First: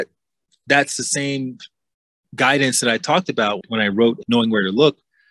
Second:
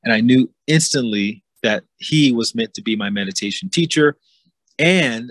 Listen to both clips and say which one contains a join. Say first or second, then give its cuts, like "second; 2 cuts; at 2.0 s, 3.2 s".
first; 1 cut; at 4.0 s